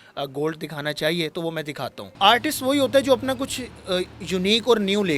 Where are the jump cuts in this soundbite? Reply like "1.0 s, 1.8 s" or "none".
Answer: 2.0 s